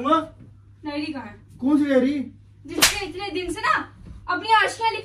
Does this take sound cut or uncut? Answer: uncut